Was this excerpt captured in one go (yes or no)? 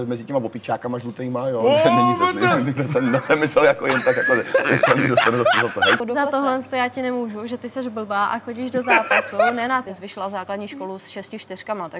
no